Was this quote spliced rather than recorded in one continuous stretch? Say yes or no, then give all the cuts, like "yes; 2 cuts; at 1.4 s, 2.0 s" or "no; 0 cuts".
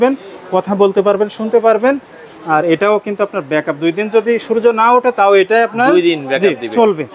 no; 0 cuts